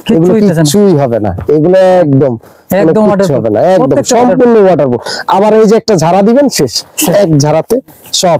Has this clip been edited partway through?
no; 0 cuts

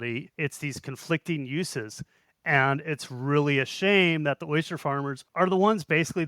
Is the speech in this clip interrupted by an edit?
yes; 1 cut; at 5.3 s

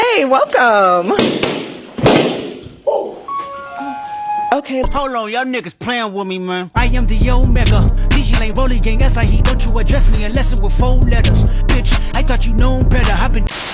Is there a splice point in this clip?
no; 0 cuts

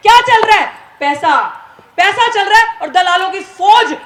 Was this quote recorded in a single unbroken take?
yes; 0 cuts

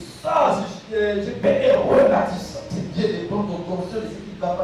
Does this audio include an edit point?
yes; 2 cuts; at 1.4 s, 2.6 s

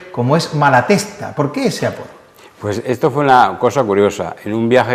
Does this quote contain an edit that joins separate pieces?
yes; 1 cut; at 2.4 s

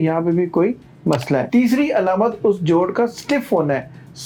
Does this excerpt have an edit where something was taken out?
no; 0 cuts

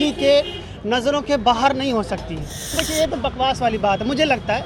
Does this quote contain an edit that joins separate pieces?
yes; 1 cut; at 2.7 s

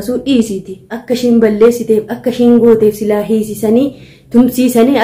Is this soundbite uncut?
no; 1 cut; at 1.0 s

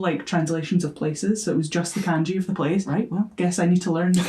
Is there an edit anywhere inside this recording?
yes; 1 cut; at 2.9 s

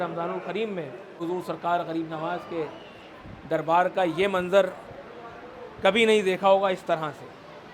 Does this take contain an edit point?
yes; 1 cut; at 1.2 s

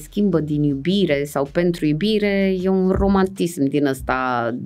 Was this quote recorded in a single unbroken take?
yes; 0 cuts

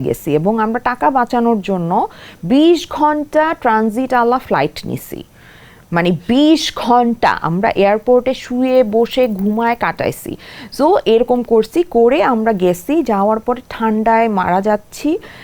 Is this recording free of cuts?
yes; 0 cuts

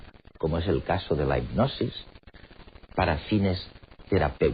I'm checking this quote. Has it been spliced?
no; 0 cuts

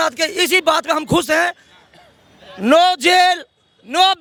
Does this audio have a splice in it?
no; 0 cuts

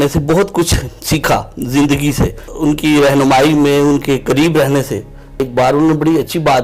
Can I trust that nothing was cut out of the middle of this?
no; 2 cuts; at 2.4 s, 5.4 s

